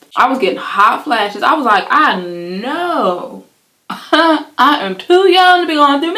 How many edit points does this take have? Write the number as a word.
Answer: zero